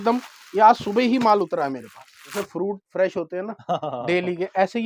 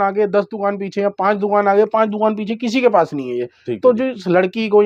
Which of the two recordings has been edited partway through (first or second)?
first